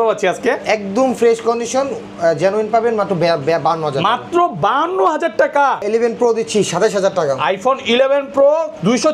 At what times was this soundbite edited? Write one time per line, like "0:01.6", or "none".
0:05.8